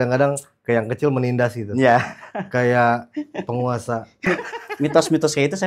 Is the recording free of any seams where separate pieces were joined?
no; 1 cut; at 4.3 s

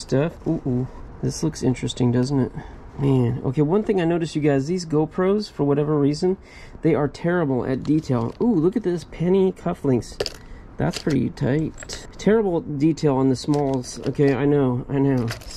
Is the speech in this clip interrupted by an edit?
no; 0 cuts

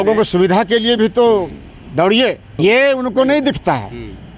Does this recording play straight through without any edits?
no; 1 cut; at 2.6 s

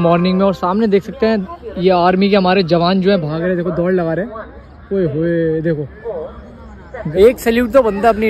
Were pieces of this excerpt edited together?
no; 0 cuts

